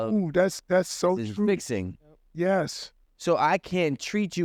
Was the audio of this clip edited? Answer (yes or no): no